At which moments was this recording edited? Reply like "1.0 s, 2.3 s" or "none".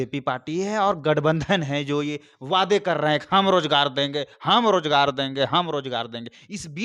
none